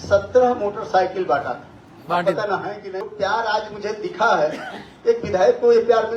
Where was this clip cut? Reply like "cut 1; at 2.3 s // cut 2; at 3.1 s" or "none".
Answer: cut 1; at 3.0 s